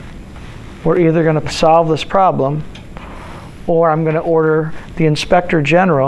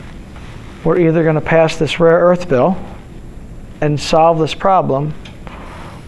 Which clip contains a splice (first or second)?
first